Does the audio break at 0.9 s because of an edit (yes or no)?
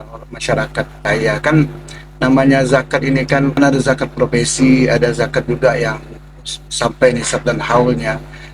no